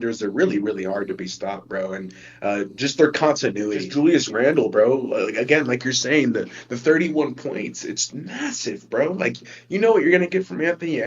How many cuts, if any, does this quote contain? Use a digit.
1